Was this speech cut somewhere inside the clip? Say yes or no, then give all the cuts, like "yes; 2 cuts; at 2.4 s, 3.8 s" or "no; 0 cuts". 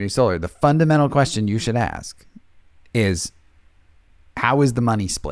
no; 0 cuts